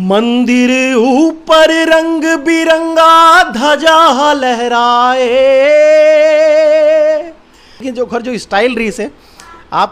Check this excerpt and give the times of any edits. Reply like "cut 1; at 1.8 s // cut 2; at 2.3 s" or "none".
cut 1; at 7.9 s